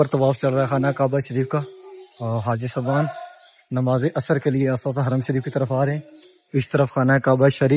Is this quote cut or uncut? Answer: uncut